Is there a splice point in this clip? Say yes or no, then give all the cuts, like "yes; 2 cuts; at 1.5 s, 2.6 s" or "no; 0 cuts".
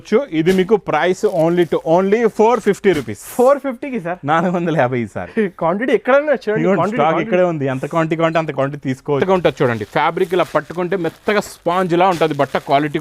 yes; 1 cut; at 9.2 s